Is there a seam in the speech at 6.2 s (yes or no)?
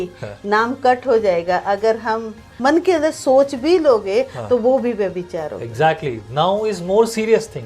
no